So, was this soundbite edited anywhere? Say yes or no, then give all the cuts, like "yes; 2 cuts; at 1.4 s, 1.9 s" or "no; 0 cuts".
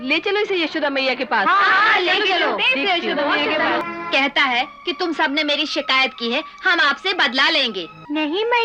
yes; 1 cut; at 3.8 s